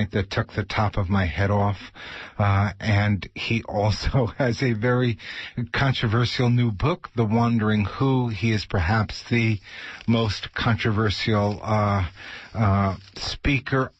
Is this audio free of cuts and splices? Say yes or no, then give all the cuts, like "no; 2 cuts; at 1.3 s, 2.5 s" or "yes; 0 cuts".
no; 1 cut; at 9.6 s